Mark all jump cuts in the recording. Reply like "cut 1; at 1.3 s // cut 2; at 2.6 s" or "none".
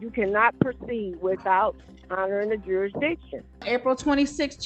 cut 1; at 3.6 s